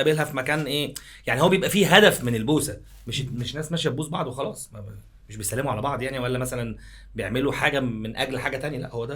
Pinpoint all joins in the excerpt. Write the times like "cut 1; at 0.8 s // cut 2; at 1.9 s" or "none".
none